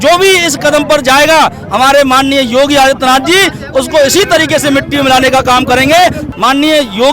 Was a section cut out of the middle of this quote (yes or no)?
yes